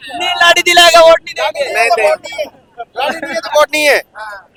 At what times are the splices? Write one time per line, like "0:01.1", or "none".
none